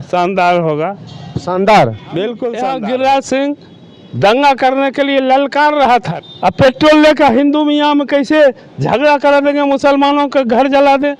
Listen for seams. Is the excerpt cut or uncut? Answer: cut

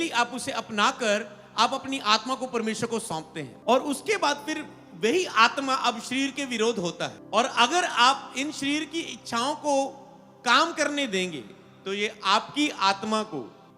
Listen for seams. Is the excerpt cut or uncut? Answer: cut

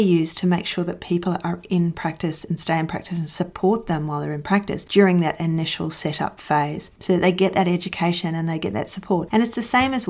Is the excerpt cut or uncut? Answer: uncut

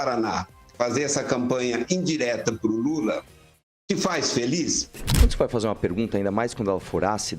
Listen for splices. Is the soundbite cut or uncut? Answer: cut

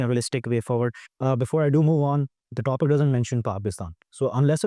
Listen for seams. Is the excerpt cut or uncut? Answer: cut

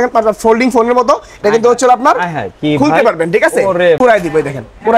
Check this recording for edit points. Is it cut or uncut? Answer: cut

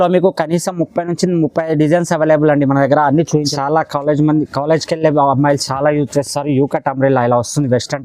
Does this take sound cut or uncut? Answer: cut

